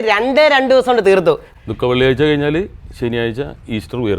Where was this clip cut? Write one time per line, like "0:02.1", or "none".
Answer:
0:01.5